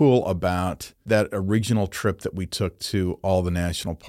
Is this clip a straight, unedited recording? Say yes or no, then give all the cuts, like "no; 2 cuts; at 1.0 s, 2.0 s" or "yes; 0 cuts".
no; 1 cut; at 1.0 s